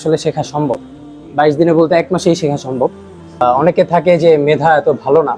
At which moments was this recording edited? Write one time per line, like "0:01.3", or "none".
0:03.4